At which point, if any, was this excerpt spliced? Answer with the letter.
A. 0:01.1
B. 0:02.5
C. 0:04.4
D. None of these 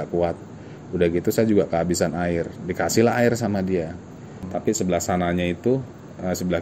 C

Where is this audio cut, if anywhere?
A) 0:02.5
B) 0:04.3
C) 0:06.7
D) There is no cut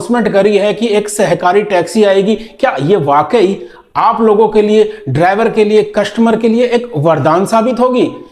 D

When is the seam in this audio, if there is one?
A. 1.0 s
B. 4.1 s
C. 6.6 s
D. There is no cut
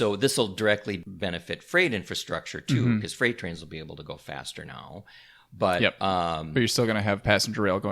A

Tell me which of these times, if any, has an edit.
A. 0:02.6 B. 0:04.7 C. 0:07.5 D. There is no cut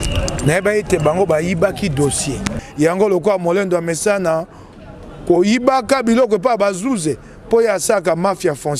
A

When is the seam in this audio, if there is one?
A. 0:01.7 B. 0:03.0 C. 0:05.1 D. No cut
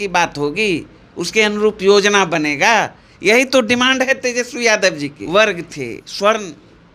C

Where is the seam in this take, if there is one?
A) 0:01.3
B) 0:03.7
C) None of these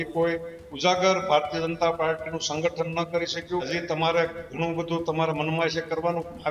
B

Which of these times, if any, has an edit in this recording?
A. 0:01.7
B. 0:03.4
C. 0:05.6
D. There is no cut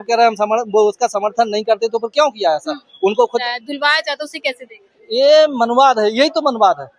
B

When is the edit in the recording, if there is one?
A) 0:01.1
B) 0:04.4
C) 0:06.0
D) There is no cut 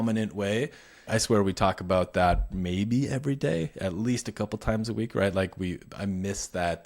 A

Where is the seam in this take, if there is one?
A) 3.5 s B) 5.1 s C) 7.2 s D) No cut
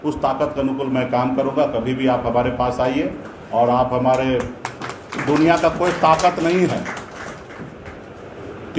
D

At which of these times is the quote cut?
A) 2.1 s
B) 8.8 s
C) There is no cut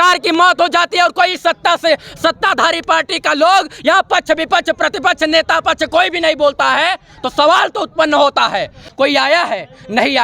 B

